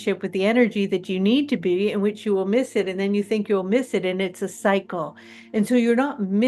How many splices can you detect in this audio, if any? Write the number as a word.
zero